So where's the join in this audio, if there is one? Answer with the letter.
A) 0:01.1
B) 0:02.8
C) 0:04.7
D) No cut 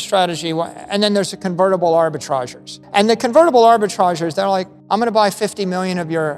B